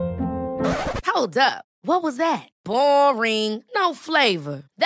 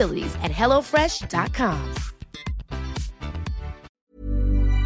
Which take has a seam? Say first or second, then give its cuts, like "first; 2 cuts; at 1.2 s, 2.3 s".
second; 1 cut; at 3.9 s